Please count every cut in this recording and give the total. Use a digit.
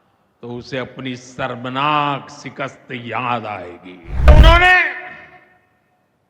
1